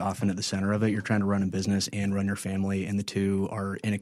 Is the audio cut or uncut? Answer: uncut